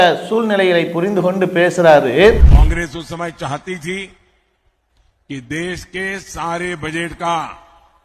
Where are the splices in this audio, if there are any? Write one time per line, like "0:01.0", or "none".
0:02.5

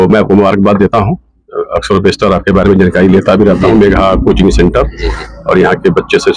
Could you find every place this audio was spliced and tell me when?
none

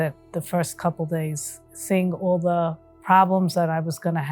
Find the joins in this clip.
0:01.7
0:02.9

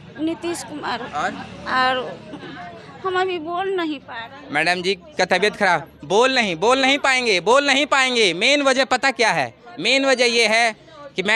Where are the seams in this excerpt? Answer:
none

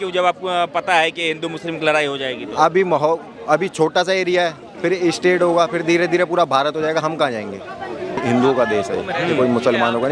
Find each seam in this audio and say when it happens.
0:08.2

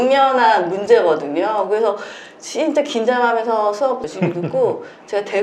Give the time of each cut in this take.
none

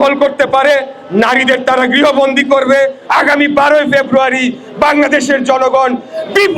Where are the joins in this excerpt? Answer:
0:03.0

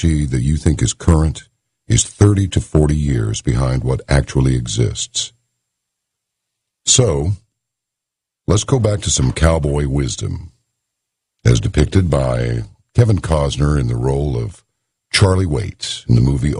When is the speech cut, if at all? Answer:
none

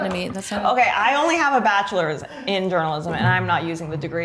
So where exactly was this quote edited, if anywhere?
none

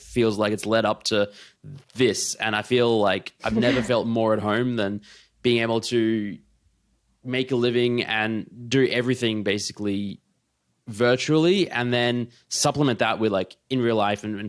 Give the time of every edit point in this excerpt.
0:12.6

